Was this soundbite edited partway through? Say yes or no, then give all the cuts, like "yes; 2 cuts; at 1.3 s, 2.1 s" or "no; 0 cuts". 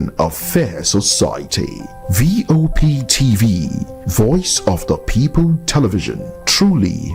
no; 0 cuts